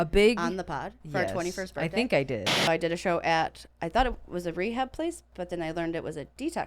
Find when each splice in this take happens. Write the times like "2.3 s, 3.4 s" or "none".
2.5 s